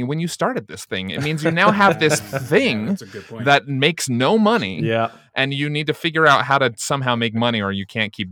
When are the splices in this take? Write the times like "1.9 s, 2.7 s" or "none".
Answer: none